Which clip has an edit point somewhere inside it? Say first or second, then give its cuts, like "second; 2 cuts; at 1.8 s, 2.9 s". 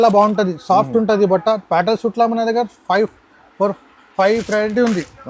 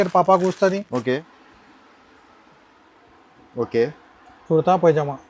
second; 1 cut; at 1.2 s